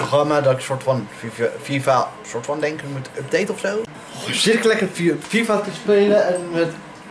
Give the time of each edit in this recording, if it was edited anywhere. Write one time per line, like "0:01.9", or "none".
0:04.0